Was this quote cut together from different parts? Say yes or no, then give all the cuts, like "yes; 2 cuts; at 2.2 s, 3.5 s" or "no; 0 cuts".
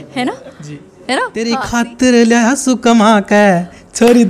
yes; 1 cut; at 1.5 s